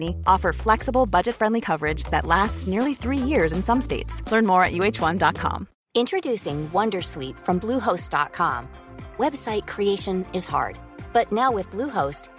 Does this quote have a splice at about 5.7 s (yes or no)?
yes